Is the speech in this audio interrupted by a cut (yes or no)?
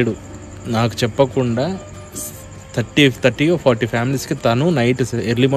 no